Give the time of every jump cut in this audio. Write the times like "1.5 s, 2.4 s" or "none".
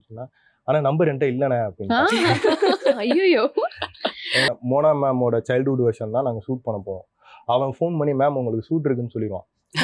4.5 s